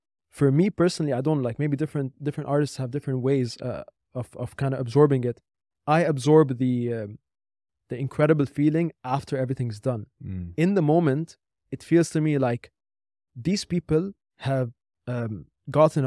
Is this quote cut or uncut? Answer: uncut